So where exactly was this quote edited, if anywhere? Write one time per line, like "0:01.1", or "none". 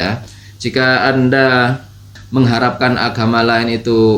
0:02.2